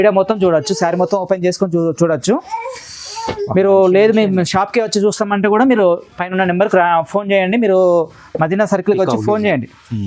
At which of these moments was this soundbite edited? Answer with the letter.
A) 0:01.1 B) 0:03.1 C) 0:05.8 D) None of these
D